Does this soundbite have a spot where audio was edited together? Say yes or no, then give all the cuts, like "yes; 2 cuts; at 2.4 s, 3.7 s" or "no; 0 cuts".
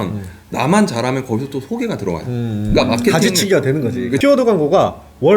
yes; 1 cut; at 4.2 s